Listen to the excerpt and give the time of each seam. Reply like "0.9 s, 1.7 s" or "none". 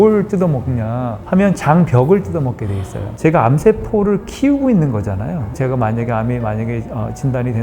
3.1 s, 5.6 s